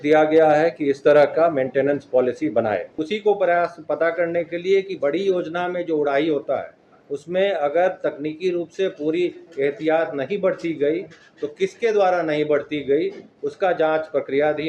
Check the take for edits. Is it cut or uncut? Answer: cut